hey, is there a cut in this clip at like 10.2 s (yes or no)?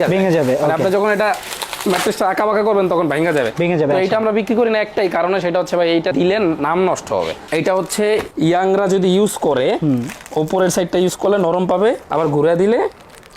no